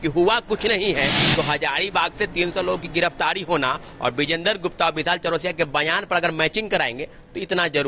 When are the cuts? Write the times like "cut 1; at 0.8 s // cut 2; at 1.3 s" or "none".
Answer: none